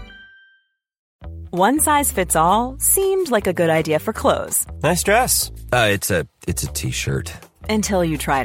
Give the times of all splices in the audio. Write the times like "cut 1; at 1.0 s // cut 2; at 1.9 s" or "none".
cut 1; at 1.1 s

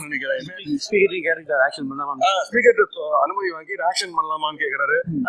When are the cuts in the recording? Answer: none

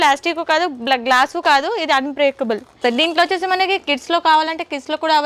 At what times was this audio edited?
cut 1; at 2.8 s

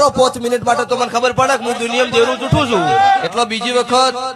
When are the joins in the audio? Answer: cut 1; at 3.3 s

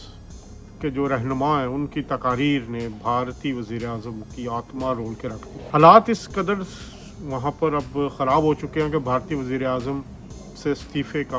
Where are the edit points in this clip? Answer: none

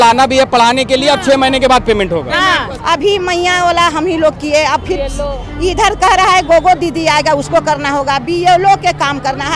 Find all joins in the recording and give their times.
cut 1; at 2.7 s

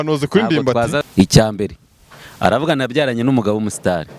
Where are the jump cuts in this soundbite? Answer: cut 1; at 1.0 s

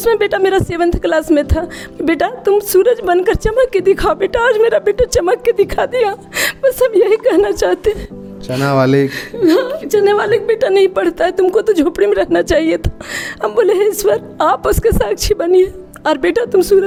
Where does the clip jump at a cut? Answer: none

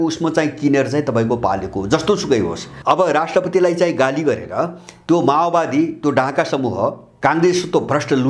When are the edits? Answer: cut 1; at 2.7 s // cut 2; at 7.1 s

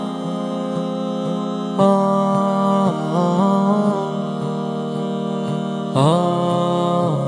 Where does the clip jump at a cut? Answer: none

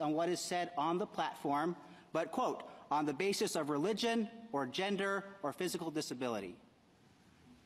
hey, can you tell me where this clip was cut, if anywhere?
cut 1; at 1.5 s // cut 2; at 6.6 s

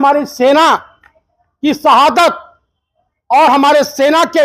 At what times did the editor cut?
none

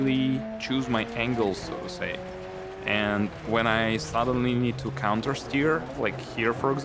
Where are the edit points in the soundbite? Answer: none

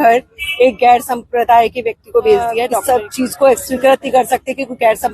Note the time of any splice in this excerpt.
cut 1; at 2.8 s

